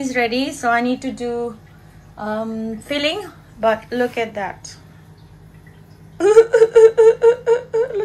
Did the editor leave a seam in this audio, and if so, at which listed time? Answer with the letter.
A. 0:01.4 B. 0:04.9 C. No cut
C